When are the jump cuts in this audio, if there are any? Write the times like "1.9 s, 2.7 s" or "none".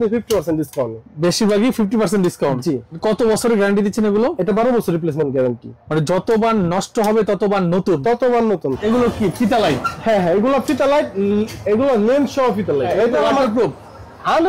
2.9 s, 8.8 s, 12.9 s